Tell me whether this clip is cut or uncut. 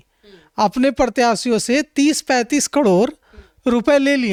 uncut